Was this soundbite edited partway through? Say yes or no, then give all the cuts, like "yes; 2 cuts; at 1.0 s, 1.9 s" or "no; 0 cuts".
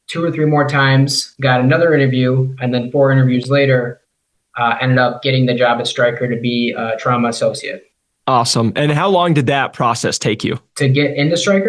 no; 0 cuts